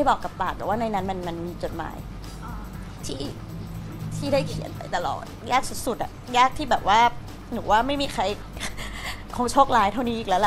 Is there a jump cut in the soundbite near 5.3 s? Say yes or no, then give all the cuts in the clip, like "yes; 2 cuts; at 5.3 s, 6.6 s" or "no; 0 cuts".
yes; 1 cut; at 5.3 s